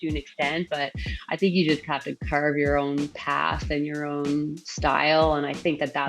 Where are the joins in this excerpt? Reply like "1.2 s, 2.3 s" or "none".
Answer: none